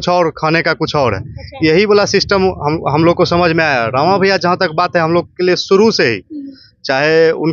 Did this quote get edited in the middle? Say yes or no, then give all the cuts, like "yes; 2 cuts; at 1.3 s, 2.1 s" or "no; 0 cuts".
no; 0 cuts